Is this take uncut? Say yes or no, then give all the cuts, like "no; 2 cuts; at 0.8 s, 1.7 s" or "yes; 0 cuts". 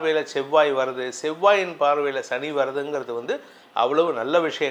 yes; 0 cuts